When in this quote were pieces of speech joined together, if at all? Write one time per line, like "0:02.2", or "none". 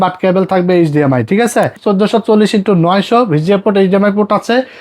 0:01.8